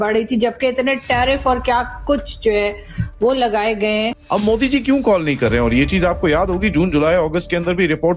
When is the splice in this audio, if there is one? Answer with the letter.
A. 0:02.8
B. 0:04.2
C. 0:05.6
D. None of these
B